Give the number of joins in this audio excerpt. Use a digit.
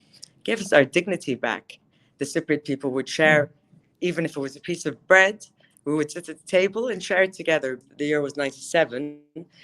1